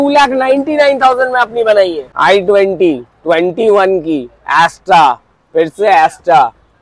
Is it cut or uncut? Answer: cut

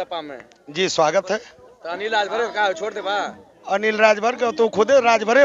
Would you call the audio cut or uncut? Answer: uncut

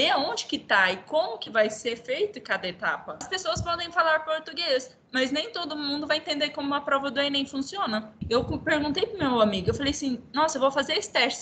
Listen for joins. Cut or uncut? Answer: cut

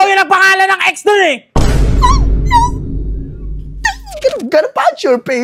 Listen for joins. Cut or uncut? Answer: uncut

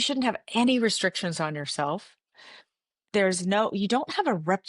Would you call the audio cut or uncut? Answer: uncut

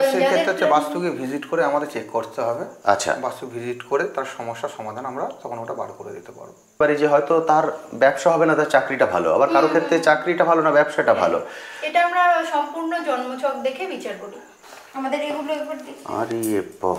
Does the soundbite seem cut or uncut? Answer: cut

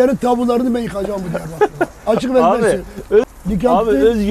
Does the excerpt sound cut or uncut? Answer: cut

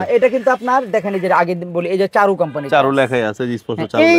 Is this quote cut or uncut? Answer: uncut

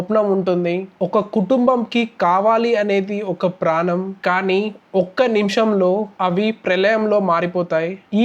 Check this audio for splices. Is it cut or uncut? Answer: uncut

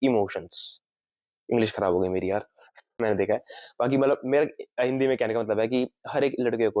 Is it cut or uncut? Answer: uncut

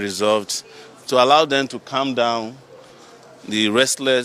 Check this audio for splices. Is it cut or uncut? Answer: uncut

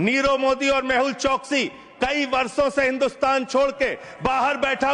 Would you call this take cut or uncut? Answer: uncut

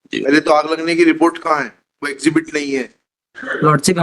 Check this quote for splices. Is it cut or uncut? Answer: cut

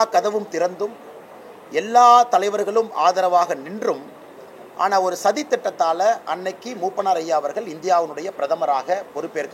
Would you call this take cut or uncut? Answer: uncut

